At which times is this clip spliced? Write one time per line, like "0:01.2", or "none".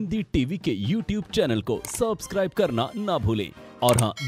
none